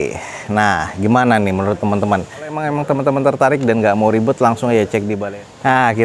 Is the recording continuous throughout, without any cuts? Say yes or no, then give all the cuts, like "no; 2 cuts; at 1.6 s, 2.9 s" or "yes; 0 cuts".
no; 2 cuts; at 2.6 s, 5.2 s